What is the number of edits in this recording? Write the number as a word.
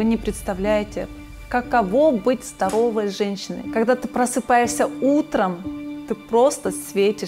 zero